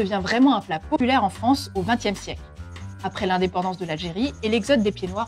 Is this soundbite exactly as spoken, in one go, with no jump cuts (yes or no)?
no